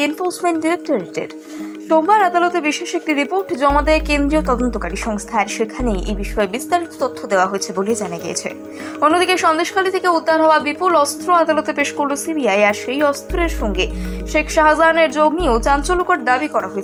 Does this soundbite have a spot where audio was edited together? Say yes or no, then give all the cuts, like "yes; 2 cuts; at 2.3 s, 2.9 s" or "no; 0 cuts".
no; 0 cuts